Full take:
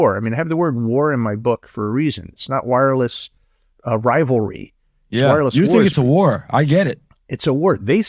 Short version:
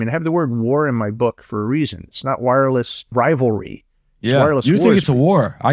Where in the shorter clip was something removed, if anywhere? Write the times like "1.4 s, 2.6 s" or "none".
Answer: 3.1 s